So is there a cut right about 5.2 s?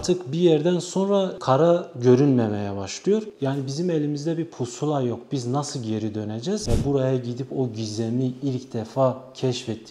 no; 2 cuts; at 3.3 s, 6.6 s

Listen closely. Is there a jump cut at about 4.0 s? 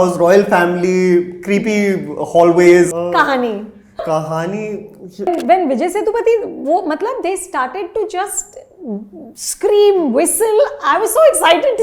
yes; 3 cuts; at 2.9 s, 4.0 s, 5.3 s

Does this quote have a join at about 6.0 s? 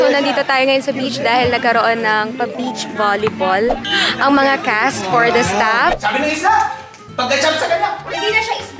yes; 1 cut; at 6.0 s

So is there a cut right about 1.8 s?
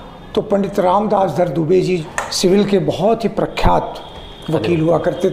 no; 0 cuts

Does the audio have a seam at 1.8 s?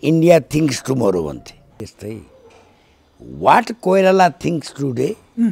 yes; 1 cut; at 1.8 s

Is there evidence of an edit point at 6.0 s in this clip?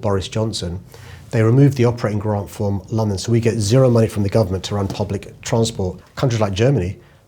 yes; 1 cut; at 6.0 s

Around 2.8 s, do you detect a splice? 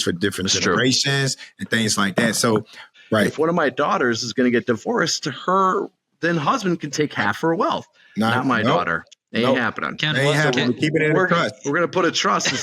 yes; 1 cut; at 2.8 s

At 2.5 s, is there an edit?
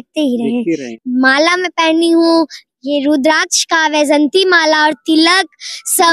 no; 1 cut; at 0.9 s

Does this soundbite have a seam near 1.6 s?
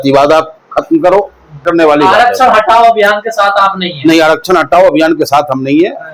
yes; 1 cut; at 1.6 s

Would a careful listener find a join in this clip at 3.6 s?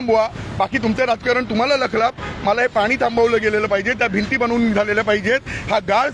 no; 0 cuts

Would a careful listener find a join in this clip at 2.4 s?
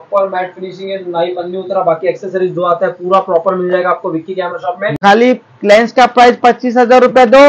no; 1 cut; at 4.9 s

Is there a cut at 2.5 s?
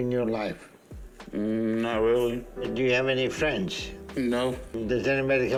no; 0 cuts

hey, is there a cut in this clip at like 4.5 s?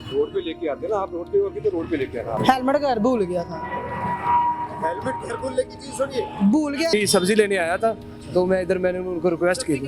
no; 2 cuts; at 2.4 s, 6.9 s

